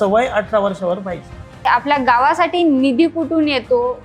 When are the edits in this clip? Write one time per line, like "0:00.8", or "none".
0:01.6